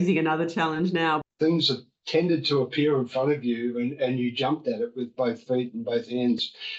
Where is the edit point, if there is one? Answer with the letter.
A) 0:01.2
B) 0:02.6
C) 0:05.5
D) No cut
A